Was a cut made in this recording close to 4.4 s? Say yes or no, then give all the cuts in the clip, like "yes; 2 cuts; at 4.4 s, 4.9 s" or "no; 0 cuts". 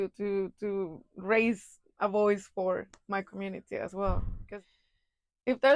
yes; 1 cut; at 4.4 s